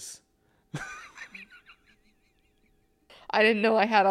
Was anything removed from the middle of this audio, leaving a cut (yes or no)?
yes